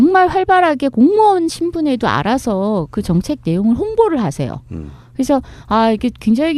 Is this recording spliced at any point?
no; 0 cuts

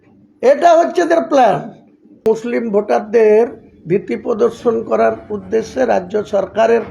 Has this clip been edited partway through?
yes; 1 cut; at 2.2 s

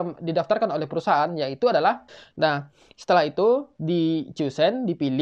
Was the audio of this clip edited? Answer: yes; 1 cut; at 2.1 s

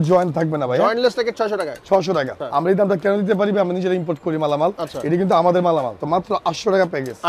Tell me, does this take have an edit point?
yes; 2 cuts; at 2.4 s, 6.0 s

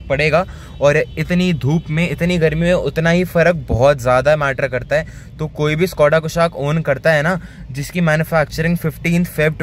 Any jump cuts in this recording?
no; 0 cuts

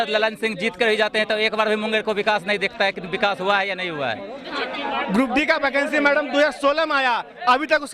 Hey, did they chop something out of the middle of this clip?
yes; 1 cut; at 4.5 s

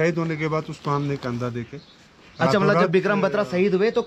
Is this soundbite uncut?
yes; 0 cuts

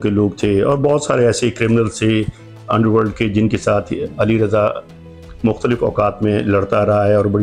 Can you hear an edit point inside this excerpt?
no; 0 cuts

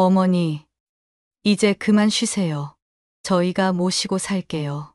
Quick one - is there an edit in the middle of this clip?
no; 0 cuts

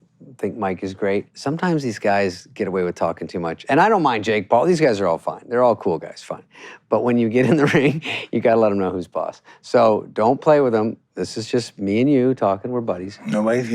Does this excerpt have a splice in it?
yes; 2 cuts; at 1.3 s, 3.6 s

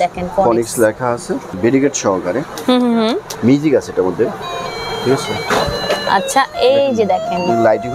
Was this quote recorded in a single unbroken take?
no; 2 cuts; at 1.6 s, 3.3 s

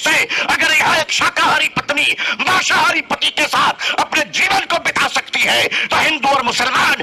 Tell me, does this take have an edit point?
no; 0 cuts

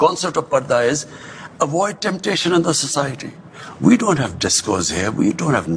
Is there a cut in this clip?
no; 0 cuts

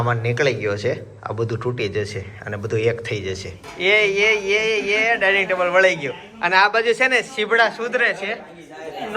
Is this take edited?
yes; 1 cut; at 3.5 s

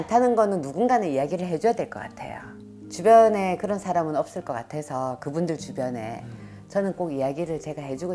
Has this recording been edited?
no; 0 cuts

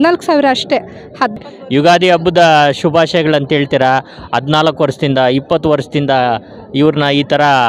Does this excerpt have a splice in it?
yes; 1 cut; at 1.5 s

